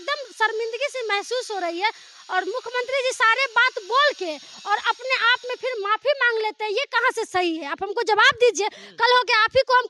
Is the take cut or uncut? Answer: uncut